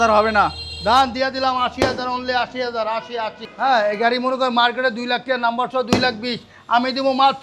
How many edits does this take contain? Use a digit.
1